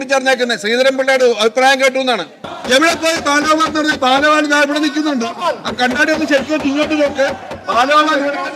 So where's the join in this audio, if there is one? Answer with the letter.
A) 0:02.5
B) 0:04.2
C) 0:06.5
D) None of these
A